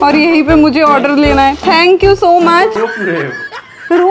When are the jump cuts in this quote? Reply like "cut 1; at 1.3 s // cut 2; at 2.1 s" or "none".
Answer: cut 1; at 2.7 s